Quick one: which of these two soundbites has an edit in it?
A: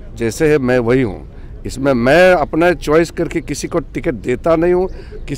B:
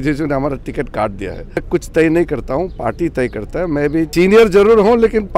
B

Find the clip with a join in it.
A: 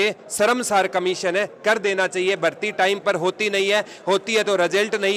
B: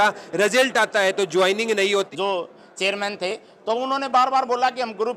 B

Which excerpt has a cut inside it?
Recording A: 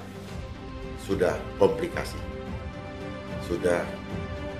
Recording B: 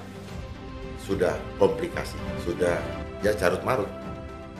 B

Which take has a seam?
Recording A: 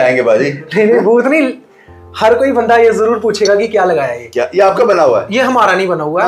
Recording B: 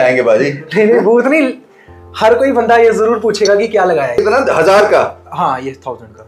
B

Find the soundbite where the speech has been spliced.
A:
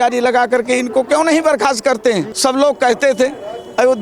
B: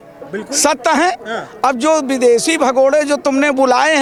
A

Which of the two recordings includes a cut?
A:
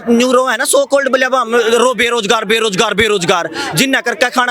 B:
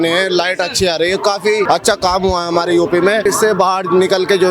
B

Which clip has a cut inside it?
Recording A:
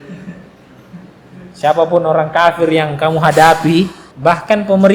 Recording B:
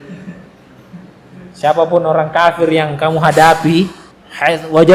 A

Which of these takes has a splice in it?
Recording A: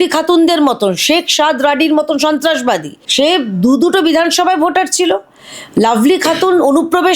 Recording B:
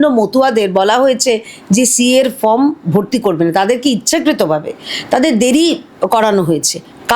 A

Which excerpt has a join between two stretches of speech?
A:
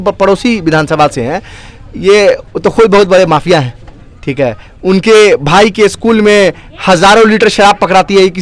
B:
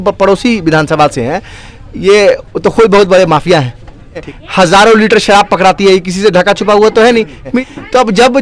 B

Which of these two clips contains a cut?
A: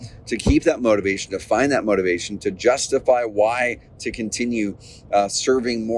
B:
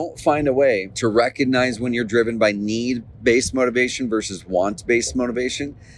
B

